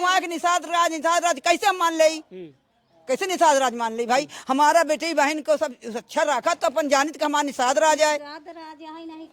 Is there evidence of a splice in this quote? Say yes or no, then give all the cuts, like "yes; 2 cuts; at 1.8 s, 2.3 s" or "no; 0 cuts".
no; 0 cuts